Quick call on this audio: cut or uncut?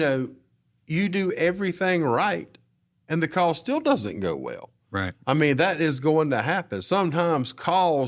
uncut